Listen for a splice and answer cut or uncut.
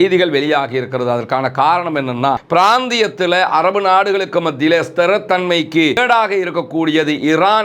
cut